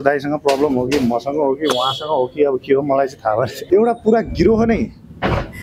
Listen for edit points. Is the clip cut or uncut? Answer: cut